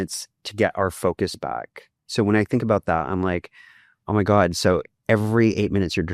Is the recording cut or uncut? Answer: cut